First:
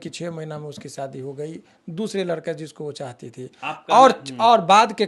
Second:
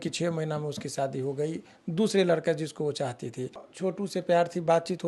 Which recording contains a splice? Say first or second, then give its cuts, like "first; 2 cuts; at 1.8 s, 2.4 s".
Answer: second; 1 cut; at 3.6 s